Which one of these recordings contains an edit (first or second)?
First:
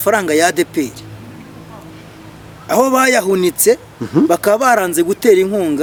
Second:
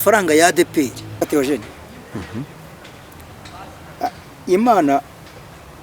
second